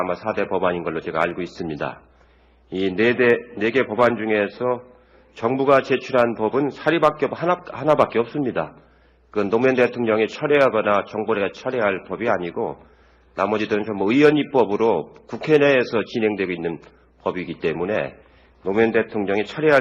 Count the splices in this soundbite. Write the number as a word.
one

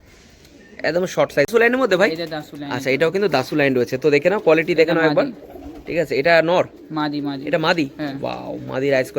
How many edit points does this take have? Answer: one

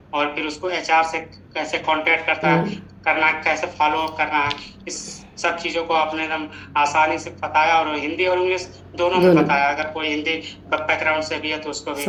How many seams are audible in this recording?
zero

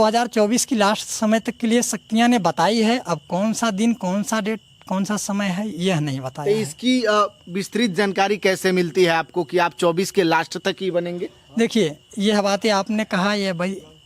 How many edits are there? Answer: zero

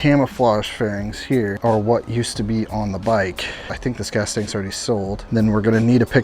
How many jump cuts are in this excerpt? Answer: three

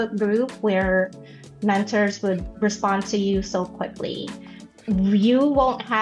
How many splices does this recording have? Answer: one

